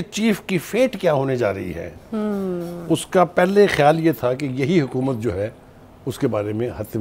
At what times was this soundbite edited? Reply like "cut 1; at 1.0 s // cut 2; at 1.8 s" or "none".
none

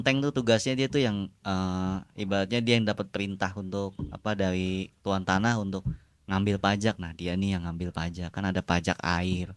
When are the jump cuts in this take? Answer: none

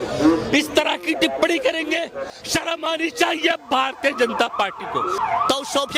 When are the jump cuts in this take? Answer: cut 1; at 2.2 s // cut 2; at 5.1 s

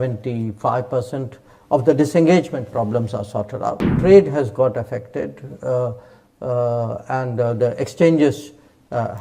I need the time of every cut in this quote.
cut 1; at 4.0 s

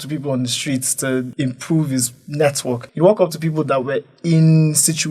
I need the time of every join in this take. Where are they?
cut 1; at 1.3 s // cut 2; at 2.9 s

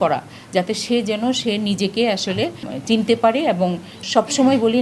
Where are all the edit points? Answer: cut 1; at 2.7 s // cut 2; at 4.0 s

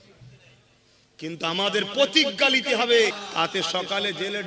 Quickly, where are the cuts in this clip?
cut 1; at 3.1 s

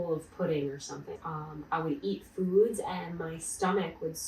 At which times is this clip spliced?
cut 1; at 1.1 s

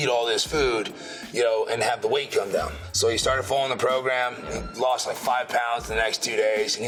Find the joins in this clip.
none

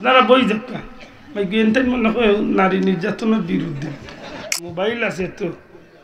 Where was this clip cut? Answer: cut 1; at 4.6 s

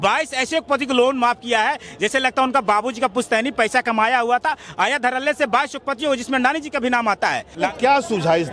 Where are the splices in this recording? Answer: cut 1; at 7.6 s

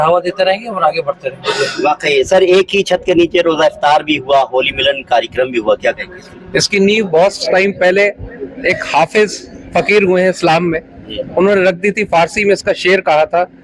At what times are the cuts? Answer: none

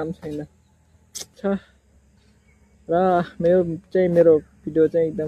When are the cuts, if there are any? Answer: cut 1; at 1.4 s

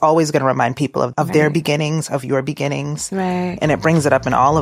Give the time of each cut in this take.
cut 1; at 1.1 s // cut 2; at 3.6 s

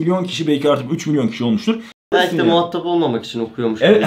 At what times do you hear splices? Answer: cut 1; at 2.1 s

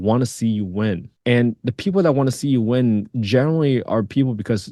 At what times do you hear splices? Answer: cut 1; at 1.1 s

